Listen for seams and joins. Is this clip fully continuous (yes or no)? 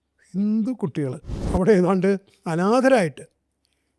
no